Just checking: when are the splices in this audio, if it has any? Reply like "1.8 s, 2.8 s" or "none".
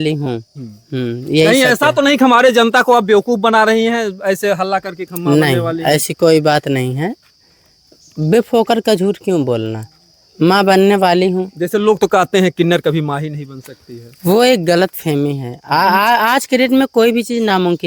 none